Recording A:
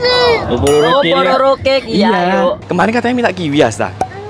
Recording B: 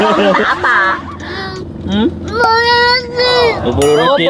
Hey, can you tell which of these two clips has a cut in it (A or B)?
A